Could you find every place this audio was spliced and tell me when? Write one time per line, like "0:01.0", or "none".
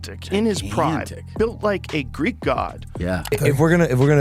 0:03.2